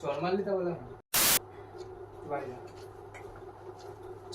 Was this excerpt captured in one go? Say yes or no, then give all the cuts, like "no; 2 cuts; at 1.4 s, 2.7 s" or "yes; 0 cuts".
no; 1 cut; at 1.1 s